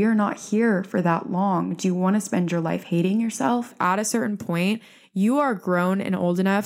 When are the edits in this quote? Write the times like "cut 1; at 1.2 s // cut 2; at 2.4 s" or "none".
cut 1; at 3.7 s